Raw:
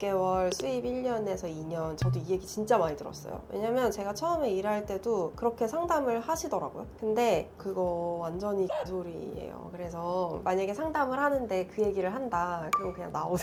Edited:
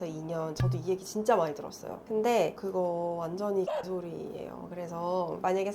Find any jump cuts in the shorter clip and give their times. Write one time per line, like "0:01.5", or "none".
0:01.9
0:02.6